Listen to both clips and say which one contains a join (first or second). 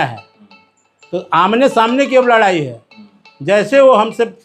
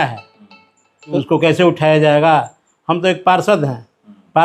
second